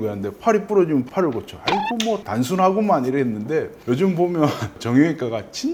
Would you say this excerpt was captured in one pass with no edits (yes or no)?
yes